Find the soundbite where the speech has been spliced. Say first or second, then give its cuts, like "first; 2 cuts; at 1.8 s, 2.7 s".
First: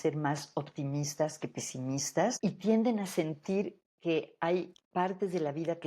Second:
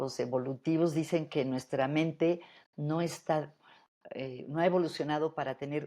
first; 3 cuts; at 2.4 s, 3.9 s, 4.8 s